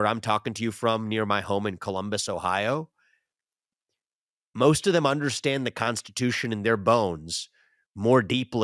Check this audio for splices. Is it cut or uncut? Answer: uncut